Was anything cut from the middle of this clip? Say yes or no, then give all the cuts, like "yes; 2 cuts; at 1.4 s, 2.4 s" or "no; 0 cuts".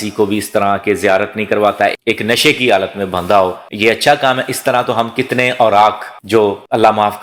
no; 0 cuts